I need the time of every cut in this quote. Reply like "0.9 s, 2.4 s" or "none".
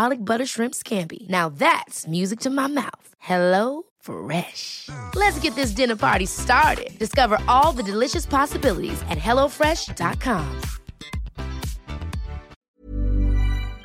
12.8 s